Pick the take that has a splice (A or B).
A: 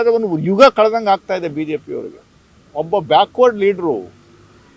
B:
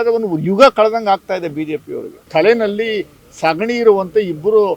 B